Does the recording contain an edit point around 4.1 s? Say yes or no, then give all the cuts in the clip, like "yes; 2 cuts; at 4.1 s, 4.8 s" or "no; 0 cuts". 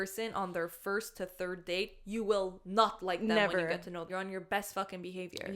yes; 1 cut; at 4.1 s